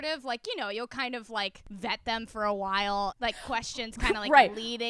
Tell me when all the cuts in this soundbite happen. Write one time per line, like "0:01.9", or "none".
0:01.6
0:03.2